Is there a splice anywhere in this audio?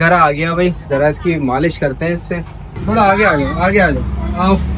yes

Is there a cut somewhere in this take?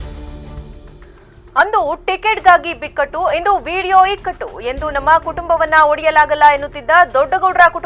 yes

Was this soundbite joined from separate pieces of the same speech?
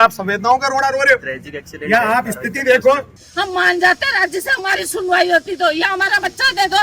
yes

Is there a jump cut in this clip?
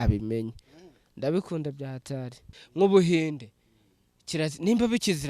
yes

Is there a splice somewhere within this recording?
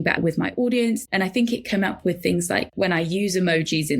yes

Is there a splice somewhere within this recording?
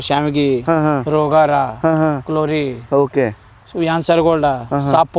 no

